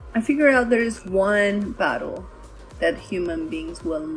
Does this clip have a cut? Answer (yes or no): no